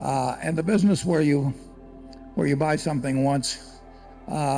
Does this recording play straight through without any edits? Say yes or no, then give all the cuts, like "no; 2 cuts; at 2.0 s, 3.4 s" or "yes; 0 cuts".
yes; 0 cuts